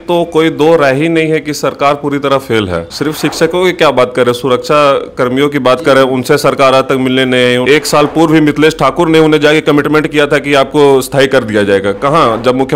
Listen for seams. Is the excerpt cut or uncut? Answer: cut